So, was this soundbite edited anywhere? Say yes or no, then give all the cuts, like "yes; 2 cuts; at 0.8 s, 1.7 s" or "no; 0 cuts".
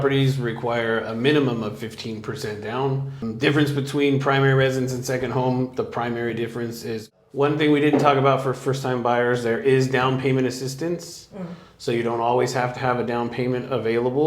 yes; 2 cuts; at 3.2 s, 7.1 s